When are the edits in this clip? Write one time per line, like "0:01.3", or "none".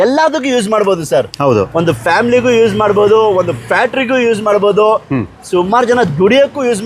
none